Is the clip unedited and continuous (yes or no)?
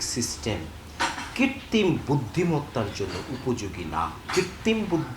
no